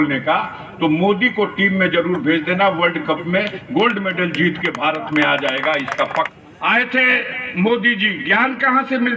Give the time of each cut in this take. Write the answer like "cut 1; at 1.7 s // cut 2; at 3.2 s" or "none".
cut 1; at 6.3 s